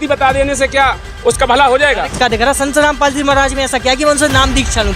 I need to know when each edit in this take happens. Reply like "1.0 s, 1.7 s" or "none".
2.2 s